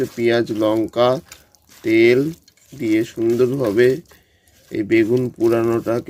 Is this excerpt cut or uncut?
uncut